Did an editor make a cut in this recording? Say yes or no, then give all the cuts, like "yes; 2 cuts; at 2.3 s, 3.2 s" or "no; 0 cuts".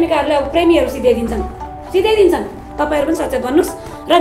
no; 0 cuts